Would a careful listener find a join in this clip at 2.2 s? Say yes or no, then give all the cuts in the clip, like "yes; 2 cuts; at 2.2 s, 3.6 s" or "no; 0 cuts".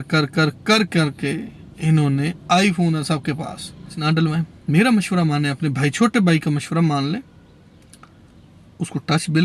no; 1 cut; at 4.0 s